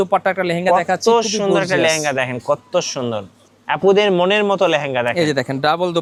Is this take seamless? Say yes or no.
yes